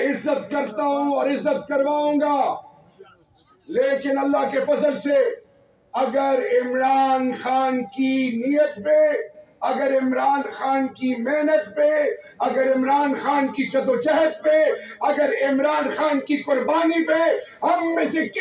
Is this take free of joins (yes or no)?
yes